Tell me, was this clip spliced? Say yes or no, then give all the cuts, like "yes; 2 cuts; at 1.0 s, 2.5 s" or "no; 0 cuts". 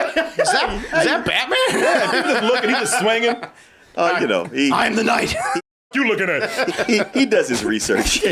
no; 0 cuts